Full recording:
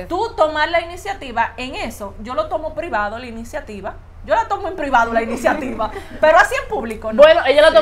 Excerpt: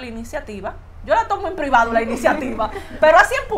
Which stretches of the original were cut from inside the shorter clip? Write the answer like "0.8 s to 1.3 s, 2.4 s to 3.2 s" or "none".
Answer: none